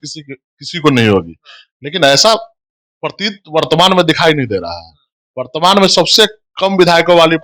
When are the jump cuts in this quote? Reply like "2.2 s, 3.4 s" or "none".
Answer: none

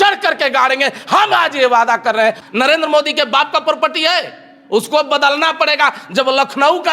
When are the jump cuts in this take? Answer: 2.4 s

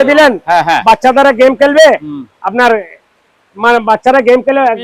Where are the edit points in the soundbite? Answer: none

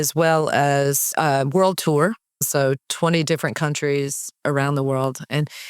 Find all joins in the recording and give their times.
2.5 s

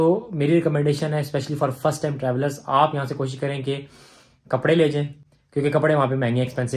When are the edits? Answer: none

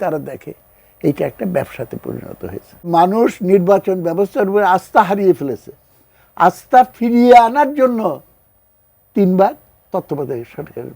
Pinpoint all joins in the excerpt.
2.9 s

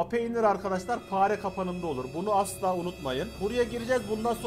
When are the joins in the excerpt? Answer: 3.3 s

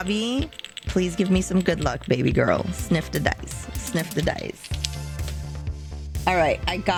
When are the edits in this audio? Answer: none

